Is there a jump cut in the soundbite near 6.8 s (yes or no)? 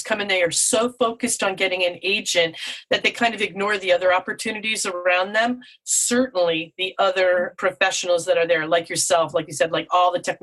no